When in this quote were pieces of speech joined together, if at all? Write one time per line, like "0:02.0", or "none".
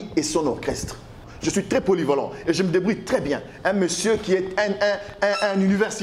0:01.2